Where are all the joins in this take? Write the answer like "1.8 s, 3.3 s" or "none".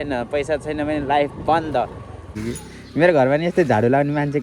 2.4 s